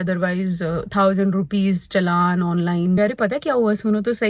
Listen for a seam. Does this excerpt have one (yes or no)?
yes